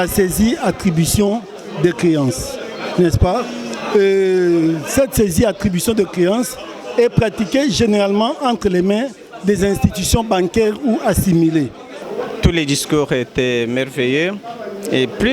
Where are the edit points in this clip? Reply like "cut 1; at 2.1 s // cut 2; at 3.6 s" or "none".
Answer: cut 1; at 12.0 s